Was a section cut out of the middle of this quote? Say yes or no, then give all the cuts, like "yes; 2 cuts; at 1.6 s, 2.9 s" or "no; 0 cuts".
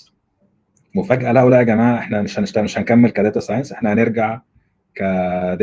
no; 0 cuts